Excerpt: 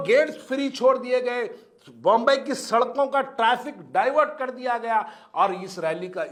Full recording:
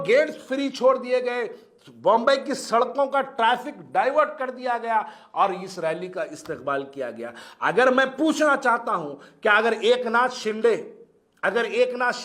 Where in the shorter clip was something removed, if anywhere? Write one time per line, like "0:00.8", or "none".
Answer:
none